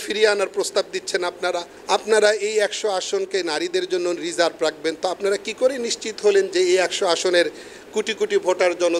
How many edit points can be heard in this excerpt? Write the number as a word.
one